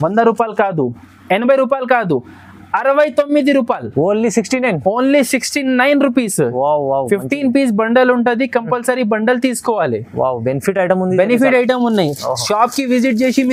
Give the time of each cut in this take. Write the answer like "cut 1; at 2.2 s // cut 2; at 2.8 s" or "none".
none